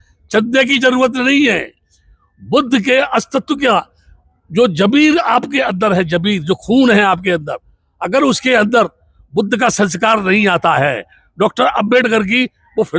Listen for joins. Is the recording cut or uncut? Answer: uncut